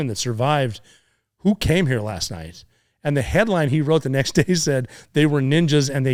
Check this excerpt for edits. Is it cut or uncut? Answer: uncut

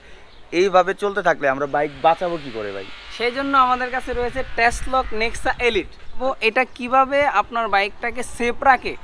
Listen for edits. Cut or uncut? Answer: cut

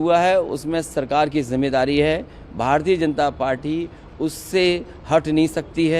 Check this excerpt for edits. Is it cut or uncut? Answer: uncut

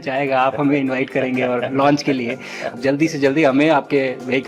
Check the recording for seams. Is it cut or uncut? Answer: cut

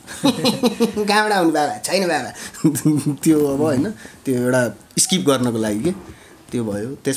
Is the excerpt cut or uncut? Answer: uncut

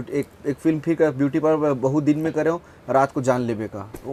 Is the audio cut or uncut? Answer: uncut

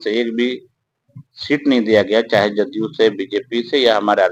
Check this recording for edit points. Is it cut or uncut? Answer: uncut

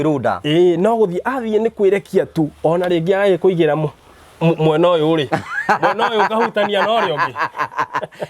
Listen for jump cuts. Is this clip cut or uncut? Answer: uncut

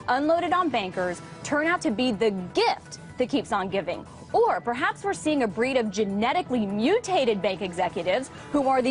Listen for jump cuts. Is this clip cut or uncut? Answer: uncut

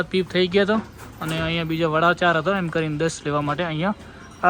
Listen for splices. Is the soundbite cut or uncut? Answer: uncut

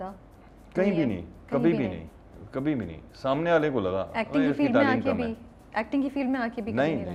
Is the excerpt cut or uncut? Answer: uncut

